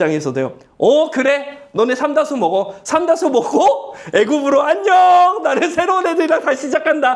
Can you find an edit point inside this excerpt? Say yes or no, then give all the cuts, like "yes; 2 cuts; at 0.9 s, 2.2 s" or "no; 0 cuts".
no; 0 cuts